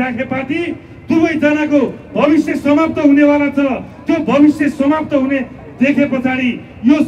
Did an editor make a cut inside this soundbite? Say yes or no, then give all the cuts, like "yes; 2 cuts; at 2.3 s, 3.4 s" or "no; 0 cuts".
no; 0 cuts